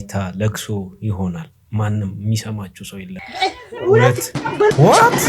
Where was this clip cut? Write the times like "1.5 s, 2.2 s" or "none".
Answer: 3.2 s